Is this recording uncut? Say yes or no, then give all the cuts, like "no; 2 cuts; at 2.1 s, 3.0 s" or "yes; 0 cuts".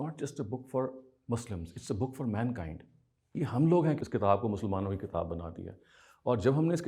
no; 1 cut; at 4.0 s